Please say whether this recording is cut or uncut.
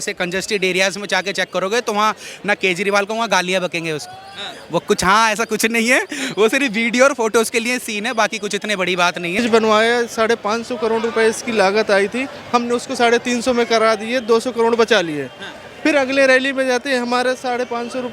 cut